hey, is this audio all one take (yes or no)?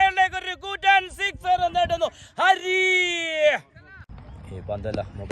no